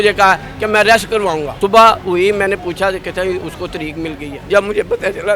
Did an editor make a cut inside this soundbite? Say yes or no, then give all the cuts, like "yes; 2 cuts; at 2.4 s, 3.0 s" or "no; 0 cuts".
yes; 2 cuts; at 1.5 s, 4.3 s